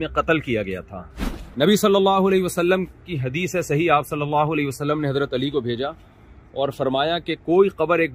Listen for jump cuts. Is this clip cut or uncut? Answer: cut